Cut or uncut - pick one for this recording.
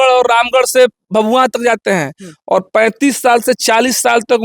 uncut